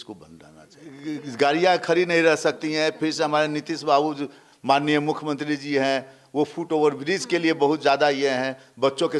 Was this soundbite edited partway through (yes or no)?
yes